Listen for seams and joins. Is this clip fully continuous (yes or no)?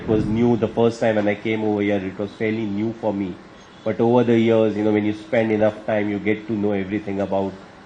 yes